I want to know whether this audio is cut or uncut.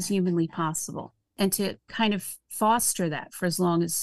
cut